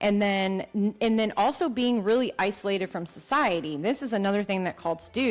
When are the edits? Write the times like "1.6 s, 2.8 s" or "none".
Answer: none